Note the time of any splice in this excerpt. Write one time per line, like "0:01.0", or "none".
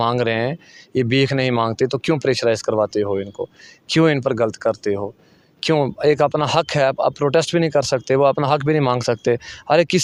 none